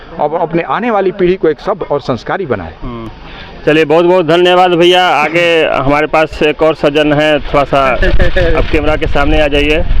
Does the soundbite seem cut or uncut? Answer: uncut